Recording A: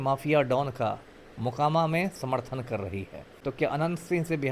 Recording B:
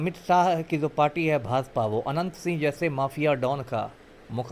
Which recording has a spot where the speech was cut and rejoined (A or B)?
A